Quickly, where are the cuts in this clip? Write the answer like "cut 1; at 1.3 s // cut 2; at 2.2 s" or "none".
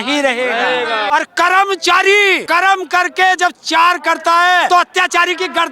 cut 1; at 1.1 s // cut 2; at 2.4 s // cut 3; at 4.7 s